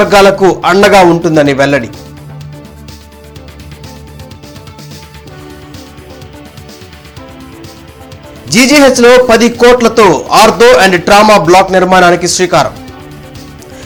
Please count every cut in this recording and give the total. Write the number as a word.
zero